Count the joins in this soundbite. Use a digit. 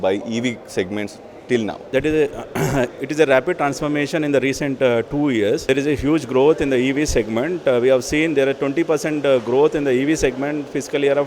2